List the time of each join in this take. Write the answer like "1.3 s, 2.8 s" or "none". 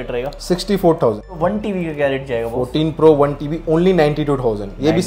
1.4 s